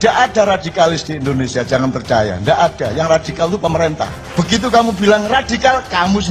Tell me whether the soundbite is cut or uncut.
cut